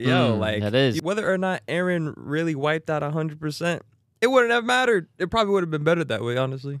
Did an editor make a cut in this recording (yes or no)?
yes